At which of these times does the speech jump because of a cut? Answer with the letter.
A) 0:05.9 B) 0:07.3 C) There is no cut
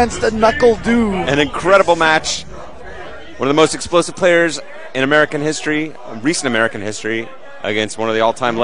B